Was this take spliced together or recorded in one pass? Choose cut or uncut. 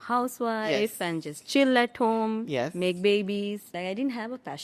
cut